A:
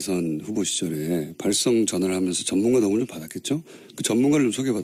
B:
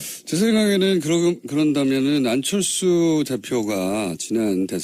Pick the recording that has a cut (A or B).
B